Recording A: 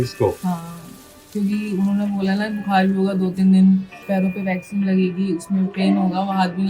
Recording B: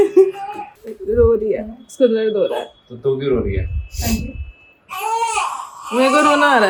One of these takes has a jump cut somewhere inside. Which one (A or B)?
A